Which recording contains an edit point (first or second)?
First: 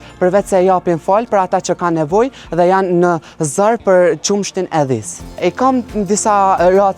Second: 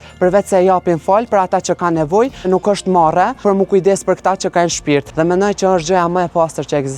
second